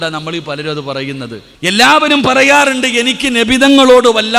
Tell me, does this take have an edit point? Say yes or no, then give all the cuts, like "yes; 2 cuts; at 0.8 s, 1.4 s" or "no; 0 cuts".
yes; 1 cut; at 1.4 s